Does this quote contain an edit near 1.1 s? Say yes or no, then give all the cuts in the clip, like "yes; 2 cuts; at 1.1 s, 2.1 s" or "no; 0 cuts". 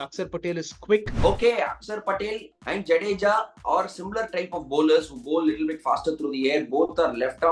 yes; 1 cut; at 1.1 s